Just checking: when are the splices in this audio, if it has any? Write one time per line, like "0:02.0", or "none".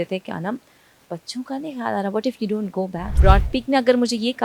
0:03.0